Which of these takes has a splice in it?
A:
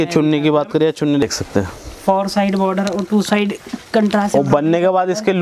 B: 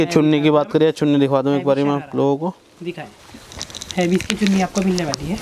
A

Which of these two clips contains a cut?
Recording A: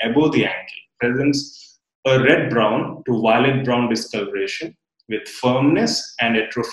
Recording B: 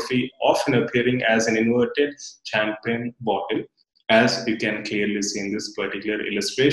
A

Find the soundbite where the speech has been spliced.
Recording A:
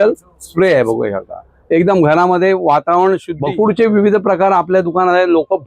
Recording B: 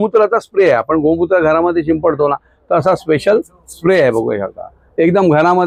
A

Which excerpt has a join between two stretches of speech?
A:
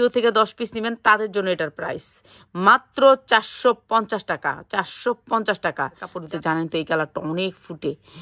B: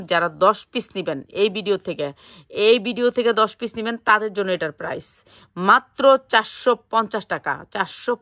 A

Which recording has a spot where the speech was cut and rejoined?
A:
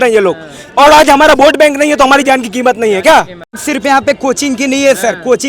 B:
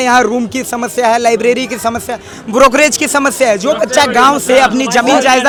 A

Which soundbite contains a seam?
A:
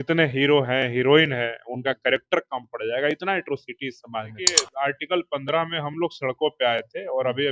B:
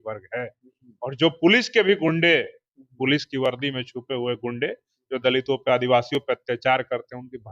A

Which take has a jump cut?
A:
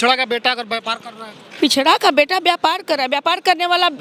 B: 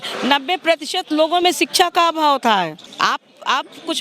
B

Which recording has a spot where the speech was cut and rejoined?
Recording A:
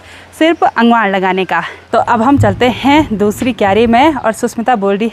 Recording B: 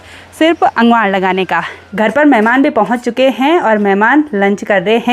B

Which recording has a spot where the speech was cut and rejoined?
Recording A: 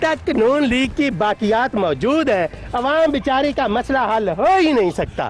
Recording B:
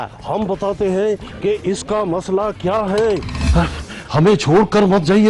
B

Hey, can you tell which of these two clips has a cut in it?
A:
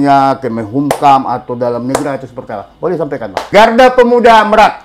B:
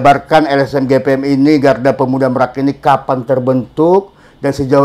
A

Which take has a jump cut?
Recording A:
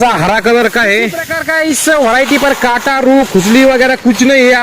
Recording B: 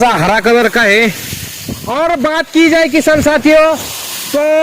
A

